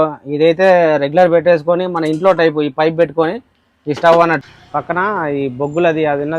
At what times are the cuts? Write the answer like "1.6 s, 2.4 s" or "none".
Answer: 4.5 s

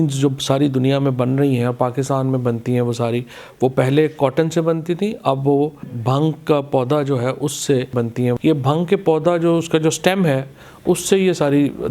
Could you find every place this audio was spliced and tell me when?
5.9 s, 8.2 s

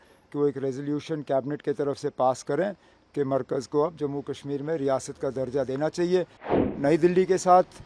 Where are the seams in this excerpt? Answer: 6.6 s

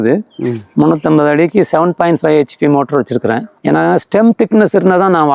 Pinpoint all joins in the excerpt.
3.5 s

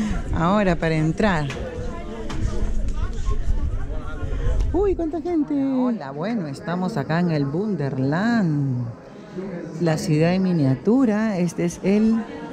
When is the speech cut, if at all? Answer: 6.0 s

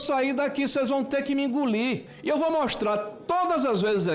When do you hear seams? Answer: 2.1 s

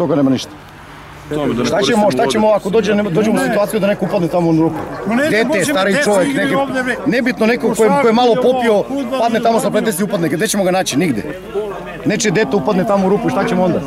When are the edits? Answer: 1.3 s

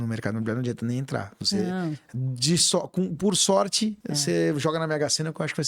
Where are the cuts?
4.1 s

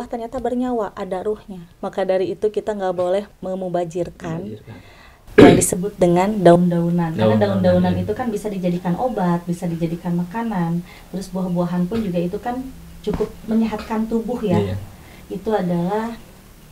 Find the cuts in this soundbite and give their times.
none

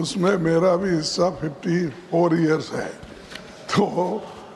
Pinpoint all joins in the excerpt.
none

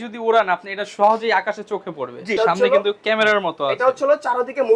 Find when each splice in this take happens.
2.4 s

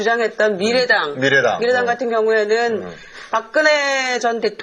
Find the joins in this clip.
none

